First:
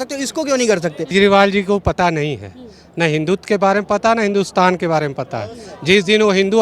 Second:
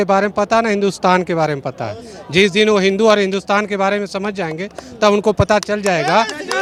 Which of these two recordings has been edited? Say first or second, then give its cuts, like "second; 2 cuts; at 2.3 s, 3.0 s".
first; 1 cut; at 1.1 s